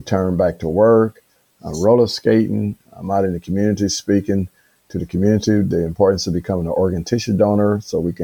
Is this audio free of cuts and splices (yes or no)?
yes